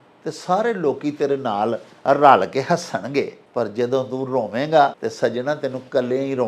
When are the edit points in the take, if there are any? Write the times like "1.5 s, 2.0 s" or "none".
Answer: 3.4 s, 5.0 s